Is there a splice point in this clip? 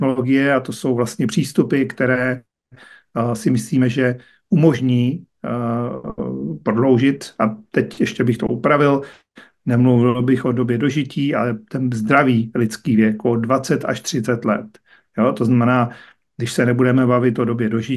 no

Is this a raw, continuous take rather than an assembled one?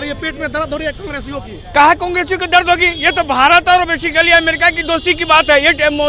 yes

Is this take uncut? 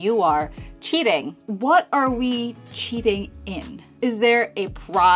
no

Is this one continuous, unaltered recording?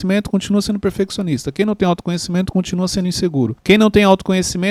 no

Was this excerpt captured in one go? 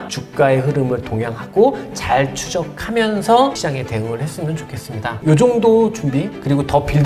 yes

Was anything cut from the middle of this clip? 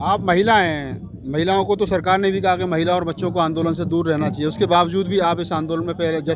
no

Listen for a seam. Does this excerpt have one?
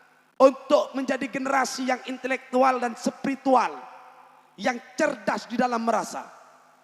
no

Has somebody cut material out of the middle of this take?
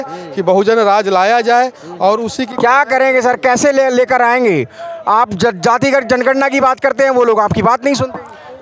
no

